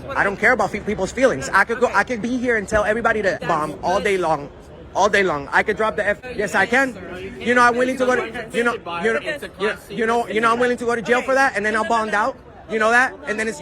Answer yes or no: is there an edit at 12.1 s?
no